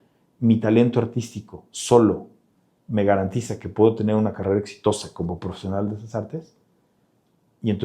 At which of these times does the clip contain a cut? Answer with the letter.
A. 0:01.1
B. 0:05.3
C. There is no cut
C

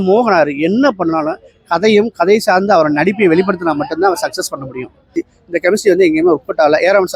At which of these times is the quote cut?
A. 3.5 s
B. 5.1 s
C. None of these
B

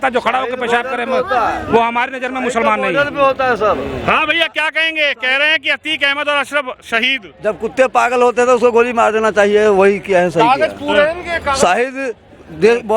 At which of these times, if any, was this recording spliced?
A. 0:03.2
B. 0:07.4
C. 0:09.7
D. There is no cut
D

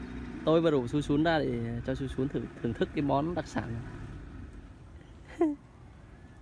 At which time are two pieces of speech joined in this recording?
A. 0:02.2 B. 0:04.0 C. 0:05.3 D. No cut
D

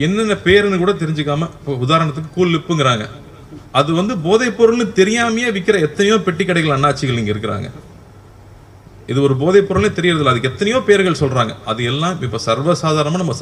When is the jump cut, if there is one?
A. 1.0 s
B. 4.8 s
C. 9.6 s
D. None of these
D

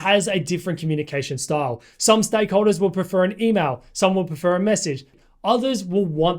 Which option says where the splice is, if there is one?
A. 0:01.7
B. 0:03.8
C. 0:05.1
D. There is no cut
C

